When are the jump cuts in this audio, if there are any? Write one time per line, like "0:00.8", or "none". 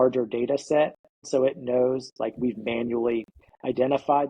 0:01.3